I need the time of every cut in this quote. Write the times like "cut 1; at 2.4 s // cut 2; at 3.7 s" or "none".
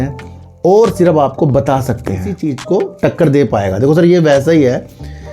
cut 1; at 2.5 s